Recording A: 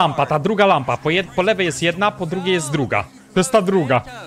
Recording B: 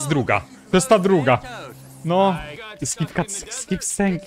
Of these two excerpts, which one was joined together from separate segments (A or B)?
B